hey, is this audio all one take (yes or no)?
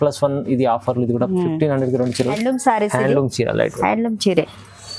no